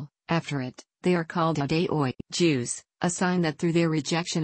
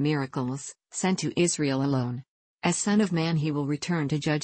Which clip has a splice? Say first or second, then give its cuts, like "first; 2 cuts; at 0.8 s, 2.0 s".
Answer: second; 1 cut; at 0.9 s